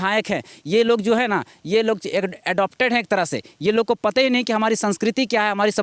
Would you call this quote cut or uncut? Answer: uncut